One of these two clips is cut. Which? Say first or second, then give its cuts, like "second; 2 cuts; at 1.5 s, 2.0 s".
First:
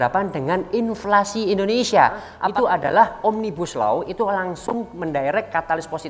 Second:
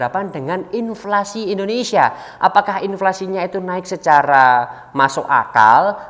first; 1 cut; at 2.3 s